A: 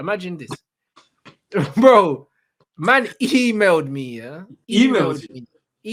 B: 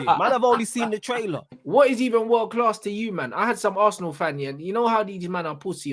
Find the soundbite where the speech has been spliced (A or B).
B